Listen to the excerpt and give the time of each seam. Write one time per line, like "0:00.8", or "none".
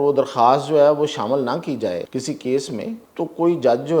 0:02.1
0:03.0